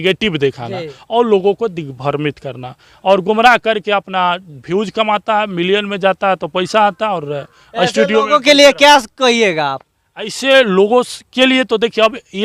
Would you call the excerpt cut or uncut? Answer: uncut